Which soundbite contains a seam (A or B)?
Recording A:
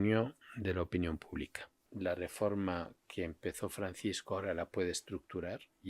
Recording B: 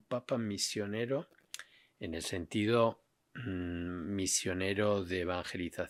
A